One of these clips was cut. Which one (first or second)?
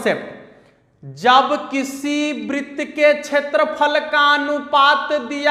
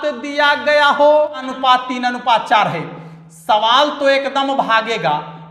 second